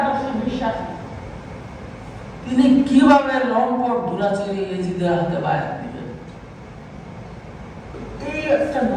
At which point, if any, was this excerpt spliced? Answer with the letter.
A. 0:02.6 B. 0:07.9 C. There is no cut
B